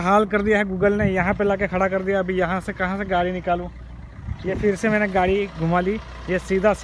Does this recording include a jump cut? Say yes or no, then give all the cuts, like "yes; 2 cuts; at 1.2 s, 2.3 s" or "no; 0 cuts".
no; 0 cuts